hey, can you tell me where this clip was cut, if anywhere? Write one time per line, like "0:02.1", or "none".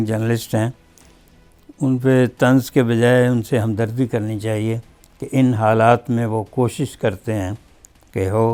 none